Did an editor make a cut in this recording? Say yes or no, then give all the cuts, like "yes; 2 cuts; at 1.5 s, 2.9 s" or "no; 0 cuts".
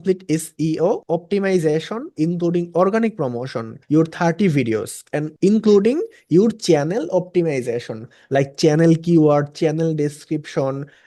no; 0 cuts